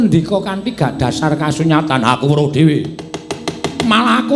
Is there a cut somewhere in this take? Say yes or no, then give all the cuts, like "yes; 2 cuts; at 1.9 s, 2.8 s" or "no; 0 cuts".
no; 0 cuts